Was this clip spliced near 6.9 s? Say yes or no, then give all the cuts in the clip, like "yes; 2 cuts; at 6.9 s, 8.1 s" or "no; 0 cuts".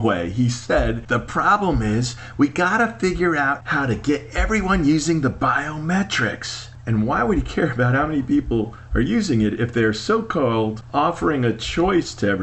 no; 3 cuts; at 1.0 s, 3.6 s, 10.8 s